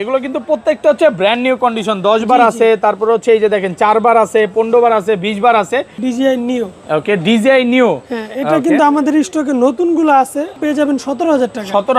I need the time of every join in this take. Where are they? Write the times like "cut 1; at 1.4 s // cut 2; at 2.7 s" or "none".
cut 1; at 6.0 s // cut 2; at 10.6 s